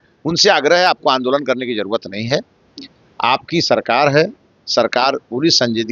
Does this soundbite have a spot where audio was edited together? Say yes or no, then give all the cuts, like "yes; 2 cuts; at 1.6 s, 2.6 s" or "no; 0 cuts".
no; 0 cuts